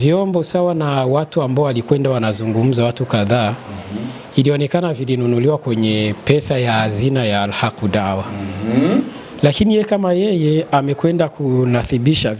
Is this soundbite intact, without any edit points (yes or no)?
yes